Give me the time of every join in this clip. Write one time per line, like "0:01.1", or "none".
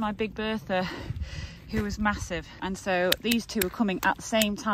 0:02.5